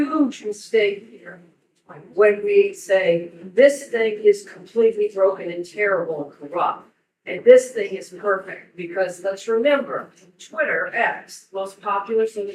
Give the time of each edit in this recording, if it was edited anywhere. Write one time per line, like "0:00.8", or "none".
none